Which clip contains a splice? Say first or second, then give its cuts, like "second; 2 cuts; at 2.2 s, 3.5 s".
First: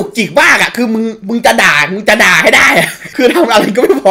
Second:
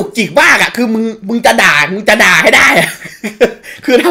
first; 1 cut; at 3.0 s